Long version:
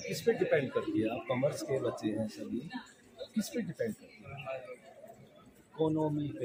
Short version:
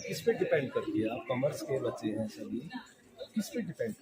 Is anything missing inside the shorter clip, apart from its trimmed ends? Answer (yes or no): no